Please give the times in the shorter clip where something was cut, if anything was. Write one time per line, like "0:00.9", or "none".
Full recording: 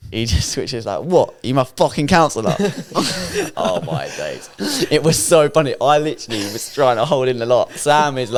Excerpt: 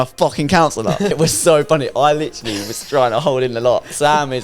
0:01.1

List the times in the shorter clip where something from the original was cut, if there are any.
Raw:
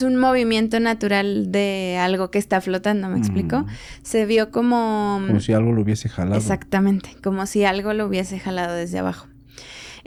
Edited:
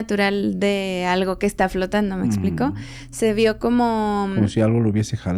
none

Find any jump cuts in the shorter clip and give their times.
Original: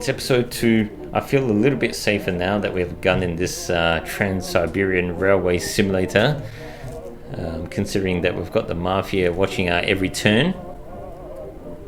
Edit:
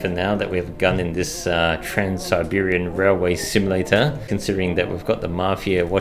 0:04.2

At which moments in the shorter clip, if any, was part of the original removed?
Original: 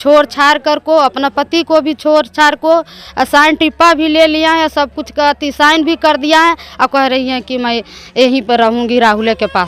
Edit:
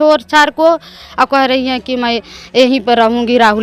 0:01.0

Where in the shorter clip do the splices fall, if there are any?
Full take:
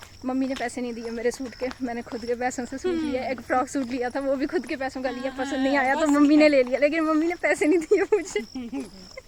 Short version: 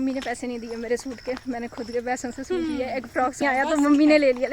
0:03.4

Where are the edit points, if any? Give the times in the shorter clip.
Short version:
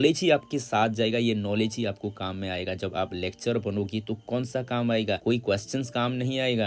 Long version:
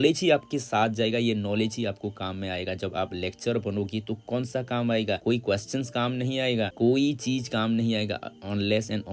none

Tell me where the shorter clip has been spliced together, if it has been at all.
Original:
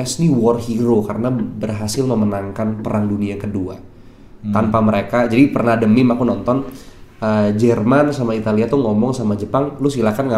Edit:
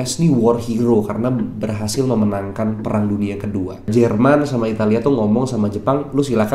0:03.9

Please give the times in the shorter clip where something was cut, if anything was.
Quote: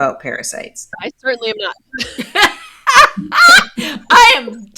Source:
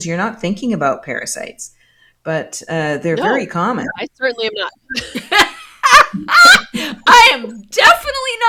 0:01.0

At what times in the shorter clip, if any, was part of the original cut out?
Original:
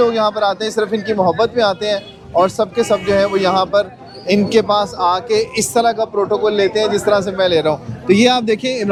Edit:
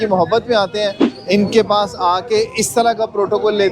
0:01.1

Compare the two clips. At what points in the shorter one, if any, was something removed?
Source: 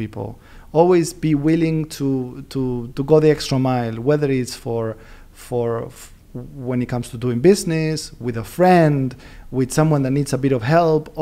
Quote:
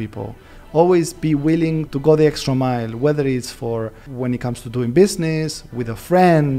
0:01.9
0:04.0

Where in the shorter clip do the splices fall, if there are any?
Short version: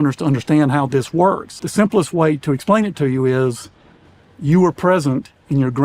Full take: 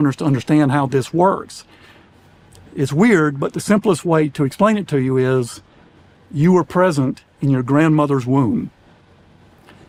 0:01.6

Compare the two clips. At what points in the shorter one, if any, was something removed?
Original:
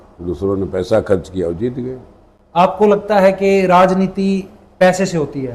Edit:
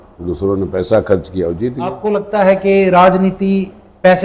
0:02.0

